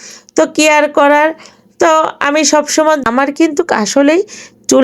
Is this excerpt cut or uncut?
cut